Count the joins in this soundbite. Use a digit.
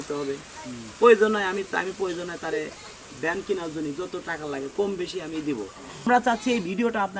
1